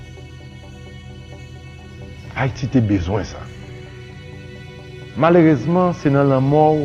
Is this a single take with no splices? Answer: no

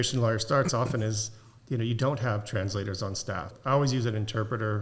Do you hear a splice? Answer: yes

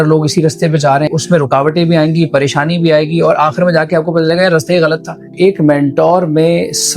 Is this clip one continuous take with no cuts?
no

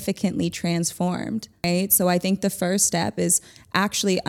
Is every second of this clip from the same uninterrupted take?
no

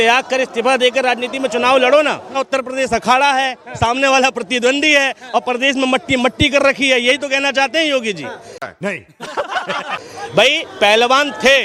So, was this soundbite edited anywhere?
yes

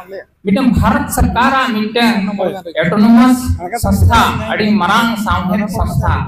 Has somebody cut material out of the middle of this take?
no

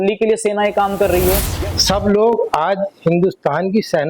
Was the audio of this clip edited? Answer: yes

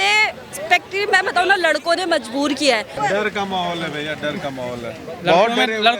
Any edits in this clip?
yes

